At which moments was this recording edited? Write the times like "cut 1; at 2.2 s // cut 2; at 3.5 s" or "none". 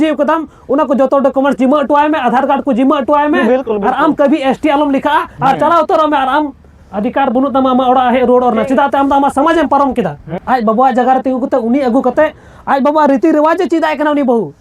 cut 1; at 10.3 s